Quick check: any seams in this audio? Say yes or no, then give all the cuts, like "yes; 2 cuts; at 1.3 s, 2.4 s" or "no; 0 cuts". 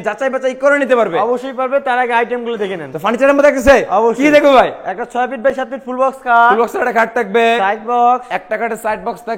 no; 0 cuts